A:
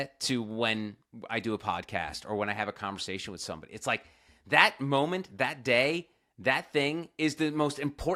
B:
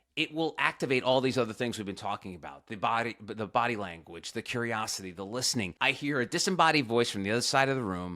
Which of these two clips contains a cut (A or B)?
B